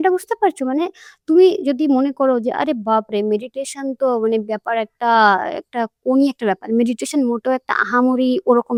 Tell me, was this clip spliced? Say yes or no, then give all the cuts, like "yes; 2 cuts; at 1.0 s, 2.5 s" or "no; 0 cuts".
no; 0 cuts